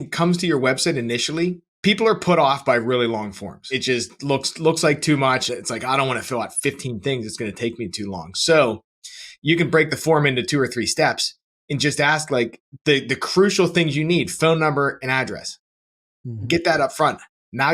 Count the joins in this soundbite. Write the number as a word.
three